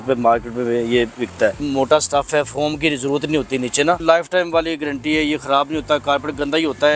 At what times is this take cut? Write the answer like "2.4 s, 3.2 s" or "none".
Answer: 1.6 s, 4.0 s